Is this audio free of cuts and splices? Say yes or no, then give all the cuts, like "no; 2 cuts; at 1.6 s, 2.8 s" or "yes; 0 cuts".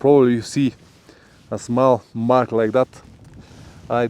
yes; 0 cuts